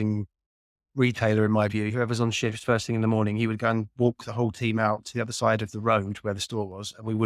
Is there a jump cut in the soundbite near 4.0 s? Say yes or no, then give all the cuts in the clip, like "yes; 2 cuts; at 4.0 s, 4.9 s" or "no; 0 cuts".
no; 1 cut; at 1.9 s